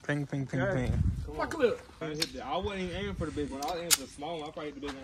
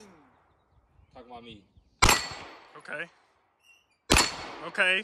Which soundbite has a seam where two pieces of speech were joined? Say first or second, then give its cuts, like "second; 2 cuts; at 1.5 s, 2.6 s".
first; 1 cut; at 2.0 s